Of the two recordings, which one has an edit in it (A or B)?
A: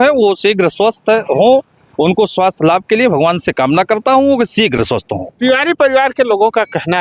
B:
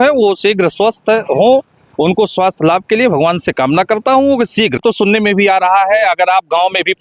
B